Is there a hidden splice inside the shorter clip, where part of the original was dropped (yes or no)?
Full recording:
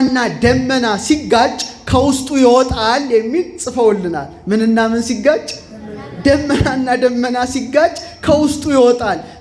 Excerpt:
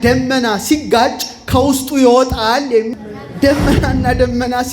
yes